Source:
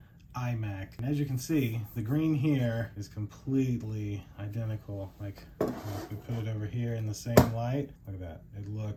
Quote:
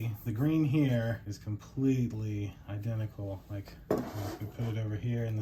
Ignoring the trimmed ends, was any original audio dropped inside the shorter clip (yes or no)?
no